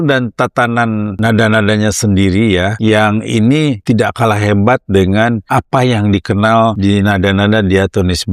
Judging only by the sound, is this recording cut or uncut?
cut